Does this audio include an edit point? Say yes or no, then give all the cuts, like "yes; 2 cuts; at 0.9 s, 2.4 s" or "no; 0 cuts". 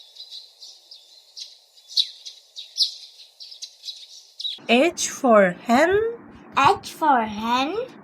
yes; 1 cut; at 4.6 s